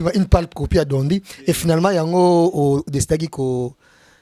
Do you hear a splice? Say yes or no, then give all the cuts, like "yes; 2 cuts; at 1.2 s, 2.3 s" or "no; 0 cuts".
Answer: no; 0 cuts